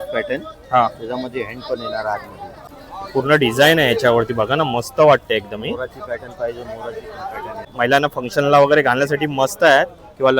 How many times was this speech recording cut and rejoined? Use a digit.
2